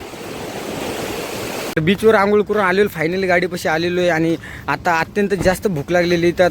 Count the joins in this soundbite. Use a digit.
1